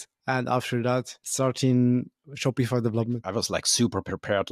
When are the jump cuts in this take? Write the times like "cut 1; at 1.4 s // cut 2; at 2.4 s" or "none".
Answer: cut 1; at 3.2 s

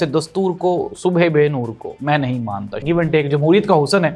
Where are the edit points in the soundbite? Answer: cut 1; at 2.8 s

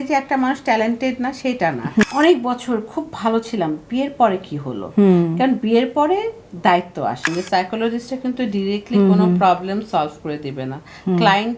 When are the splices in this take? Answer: cut 1; at 2.0 s // cut 2; at 7.3 s

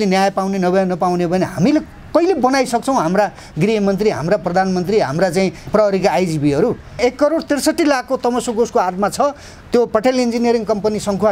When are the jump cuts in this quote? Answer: cut 1; at 7.0 s

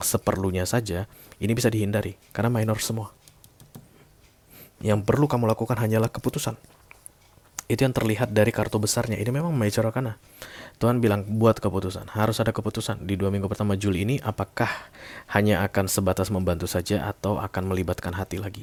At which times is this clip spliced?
none

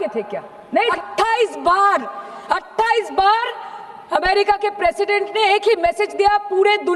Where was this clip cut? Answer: cut 1; at 0.9 s

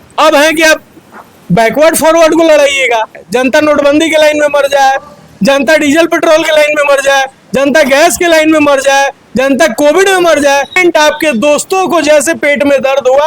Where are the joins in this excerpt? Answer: cut 1; at 3.2 s // cut 2; at 10.8 s

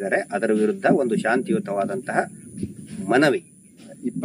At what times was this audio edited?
none

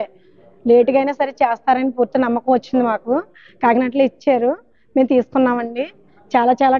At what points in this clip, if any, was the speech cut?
cut 1; at 3.4 s

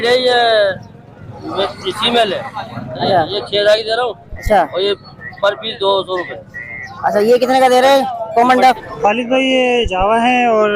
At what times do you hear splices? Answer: cut 1; at 8.9 s

